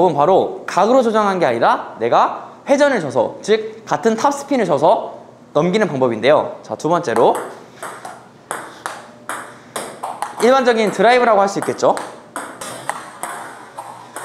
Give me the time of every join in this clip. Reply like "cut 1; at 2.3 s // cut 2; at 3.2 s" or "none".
none